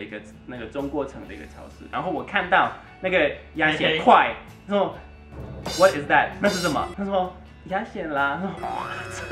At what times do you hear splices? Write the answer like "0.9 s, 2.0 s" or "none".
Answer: 1.9 s